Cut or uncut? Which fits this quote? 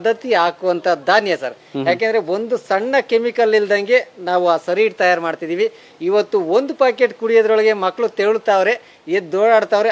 uncut